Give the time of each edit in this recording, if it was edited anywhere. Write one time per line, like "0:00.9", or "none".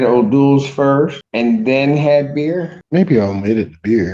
0:01.2
0:02.8